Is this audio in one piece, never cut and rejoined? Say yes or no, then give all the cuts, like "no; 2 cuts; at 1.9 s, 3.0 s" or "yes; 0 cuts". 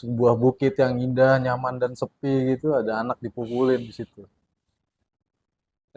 yes; 0 cuts